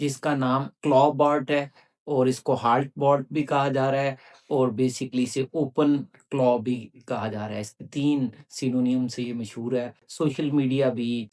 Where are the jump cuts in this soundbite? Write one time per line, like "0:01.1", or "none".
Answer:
0:10.0